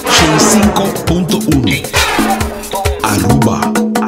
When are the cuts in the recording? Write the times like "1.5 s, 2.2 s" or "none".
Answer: none